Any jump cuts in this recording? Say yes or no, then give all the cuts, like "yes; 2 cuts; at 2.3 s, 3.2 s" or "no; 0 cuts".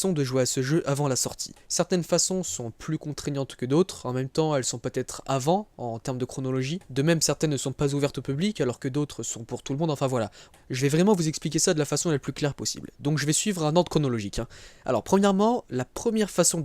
yes; 1 cut; at 8.1 s